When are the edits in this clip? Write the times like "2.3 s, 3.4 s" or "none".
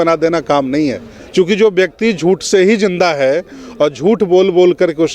1.1 s